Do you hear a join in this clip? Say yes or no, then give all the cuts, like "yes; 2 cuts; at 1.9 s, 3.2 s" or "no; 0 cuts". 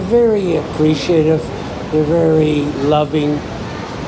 no; 0 cuts